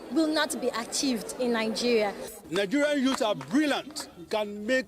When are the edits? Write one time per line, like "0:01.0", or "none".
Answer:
0:02.4